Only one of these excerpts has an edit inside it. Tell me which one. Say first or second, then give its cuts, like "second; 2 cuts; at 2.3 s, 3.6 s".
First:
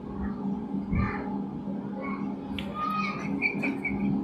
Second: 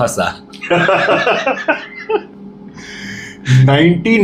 first; 1 cut; at 2.8 s